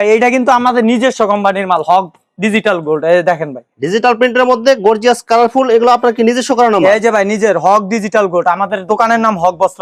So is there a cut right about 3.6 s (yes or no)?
no